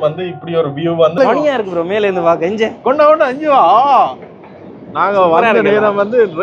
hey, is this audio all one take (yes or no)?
no